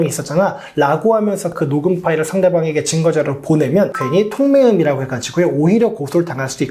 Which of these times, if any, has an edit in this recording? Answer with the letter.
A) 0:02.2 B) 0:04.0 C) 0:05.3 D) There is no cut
B